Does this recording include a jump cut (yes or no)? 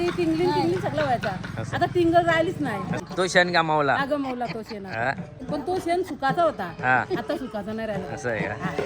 yes